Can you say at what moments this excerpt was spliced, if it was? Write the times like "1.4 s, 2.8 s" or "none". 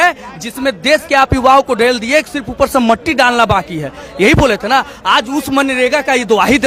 none